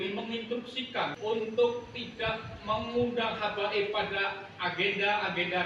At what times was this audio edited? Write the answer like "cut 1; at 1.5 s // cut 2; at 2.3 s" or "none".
cut 1; at 1.5 s